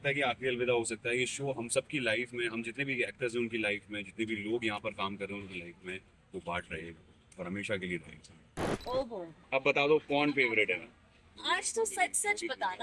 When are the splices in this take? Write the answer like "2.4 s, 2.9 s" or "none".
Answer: 8.7 s